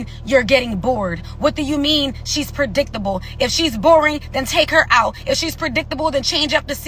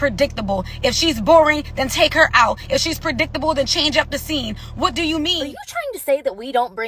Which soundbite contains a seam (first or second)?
second